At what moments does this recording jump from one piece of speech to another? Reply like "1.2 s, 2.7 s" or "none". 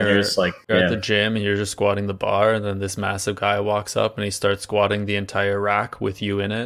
none